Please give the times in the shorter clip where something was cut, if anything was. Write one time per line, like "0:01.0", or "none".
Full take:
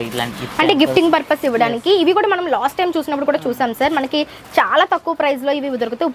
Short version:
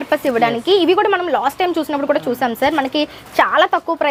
none